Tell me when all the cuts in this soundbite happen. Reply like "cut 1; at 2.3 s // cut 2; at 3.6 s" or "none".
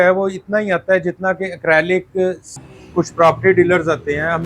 cut 1; at 2.6 s

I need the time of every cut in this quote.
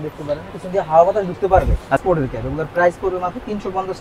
cut 1; at 2.0 s

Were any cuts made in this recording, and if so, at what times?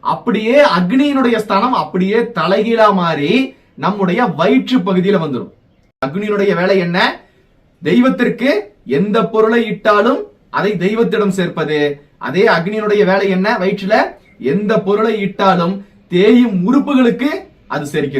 cut 1; at 6.1 s

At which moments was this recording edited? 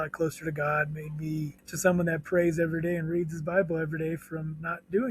cut 1; at 1.6 s

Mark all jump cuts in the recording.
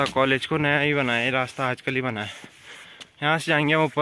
none

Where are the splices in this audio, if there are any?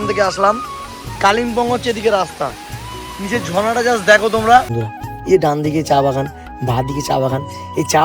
cut 1; at 4.8 s

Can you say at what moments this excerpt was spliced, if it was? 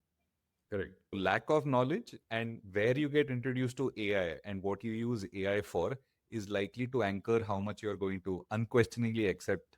cut 1; at 1.1 s

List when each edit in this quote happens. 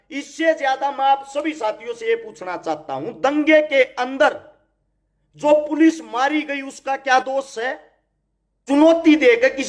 cut 1; at 8.6 s

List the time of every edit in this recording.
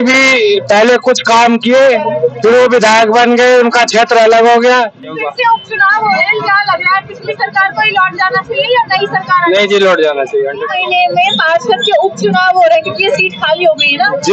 cut 1; at 5.3 s // cut 2; at 10.7 s

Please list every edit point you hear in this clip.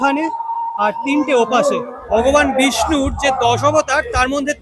cut 1; at 1.9 s

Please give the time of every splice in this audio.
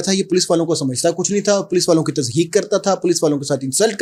none

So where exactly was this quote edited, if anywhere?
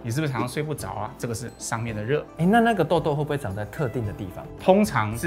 none

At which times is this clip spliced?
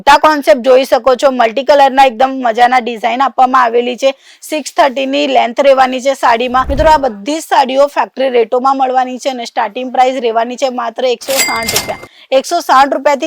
cut 1; at 6.7 s

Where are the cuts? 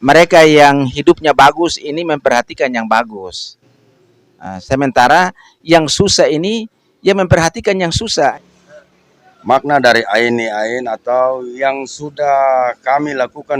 cut 1; at 8.4 s

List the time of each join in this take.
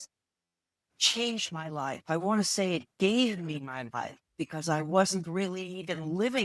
none

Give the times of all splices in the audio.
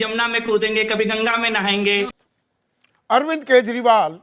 cut 1; at 2.2 s

